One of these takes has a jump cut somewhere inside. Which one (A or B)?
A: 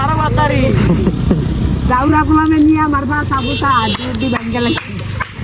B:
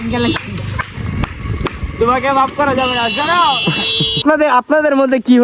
B